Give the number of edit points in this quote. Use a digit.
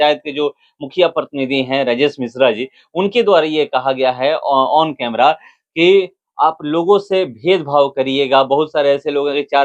0